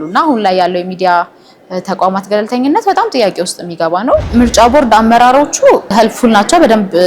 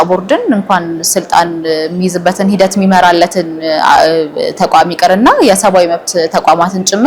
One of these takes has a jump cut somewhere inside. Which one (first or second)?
first